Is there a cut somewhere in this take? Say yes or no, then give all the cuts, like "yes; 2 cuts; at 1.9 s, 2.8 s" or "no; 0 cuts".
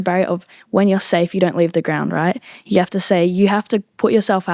no; 0 cuts